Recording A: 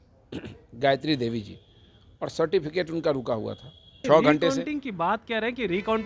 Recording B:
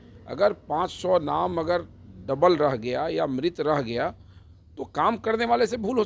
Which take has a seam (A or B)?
A